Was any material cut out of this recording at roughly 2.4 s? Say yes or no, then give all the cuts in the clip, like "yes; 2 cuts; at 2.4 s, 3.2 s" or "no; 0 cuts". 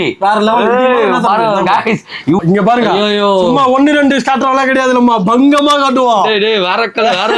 yes; 1 cut; at 2.4 s